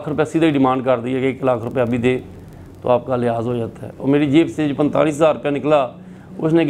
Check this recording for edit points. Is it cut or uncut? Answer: uncut